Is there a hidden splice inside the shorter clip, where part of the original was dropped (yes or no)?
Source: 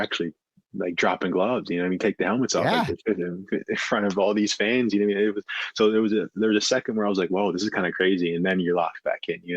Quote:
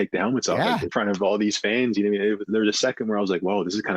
yes